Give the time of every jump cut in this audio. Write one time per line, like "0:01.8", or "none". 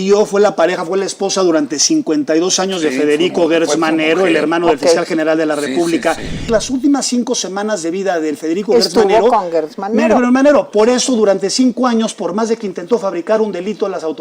0:06.4